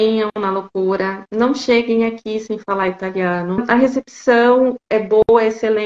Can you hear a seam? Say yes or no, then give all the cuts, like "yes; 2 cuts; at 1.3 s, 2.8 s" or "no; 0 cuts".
yes; 1 cut; at 3.6 s